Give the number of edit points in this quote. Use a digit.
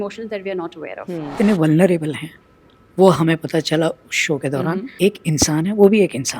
2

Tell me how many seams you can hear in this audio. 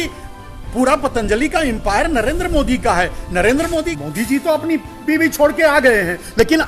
1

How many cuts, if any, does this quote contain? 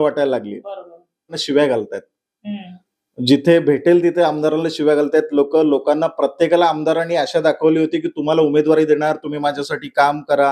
1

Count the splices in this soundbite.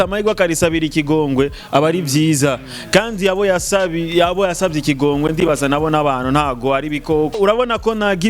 1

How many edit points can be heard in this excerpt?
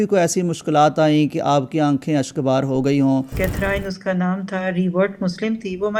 1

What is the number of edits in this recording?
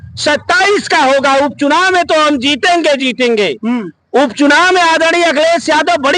0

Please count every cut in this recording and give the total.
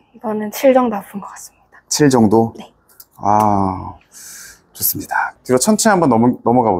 1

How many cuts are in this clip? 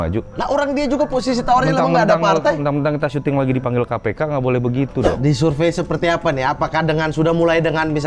1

